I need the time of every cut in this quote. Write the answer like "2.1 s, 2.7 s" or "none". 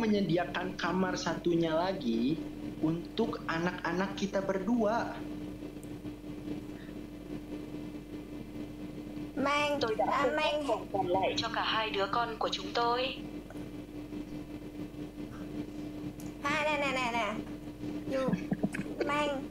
none